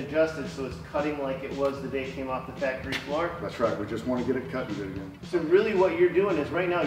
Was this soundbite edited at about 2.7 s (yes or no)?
no